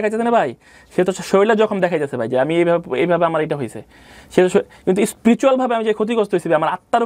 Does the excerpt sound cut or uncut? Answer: uncut